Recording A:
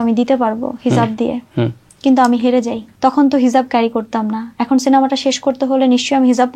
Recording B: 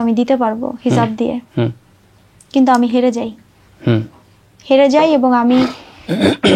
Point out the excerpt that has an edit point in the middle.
A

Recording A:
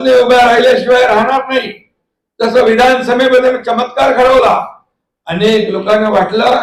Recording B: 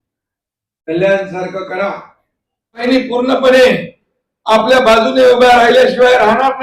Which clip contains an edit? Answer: B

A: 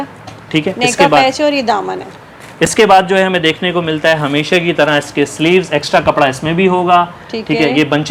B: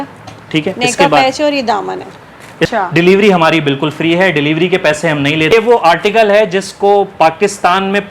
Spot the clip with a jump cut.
B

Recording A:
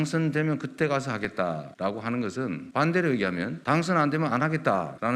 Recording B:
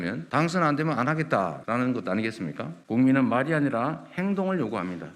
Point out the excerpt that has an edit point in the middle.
B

